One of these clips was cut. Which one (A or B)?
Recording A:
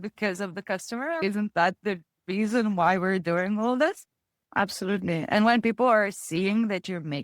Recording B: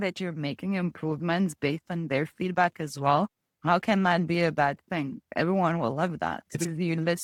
A